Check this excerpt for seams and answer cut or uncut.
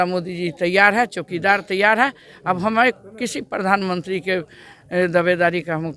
uncut